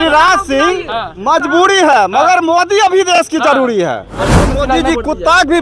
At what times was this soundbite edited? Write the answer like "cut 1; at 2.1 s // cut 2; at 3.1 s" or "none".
cut 1; at 4.6 s